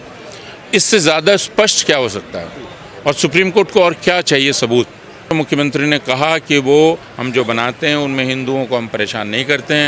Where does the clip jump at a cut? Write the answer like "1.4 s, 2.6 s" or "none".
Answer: 5.3 s, 7.1 s